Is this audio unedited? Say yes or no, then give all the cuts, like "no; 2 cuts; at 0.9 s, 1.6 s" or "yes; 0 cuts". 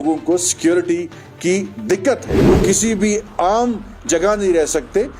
no; 1 cut; at 2.3 s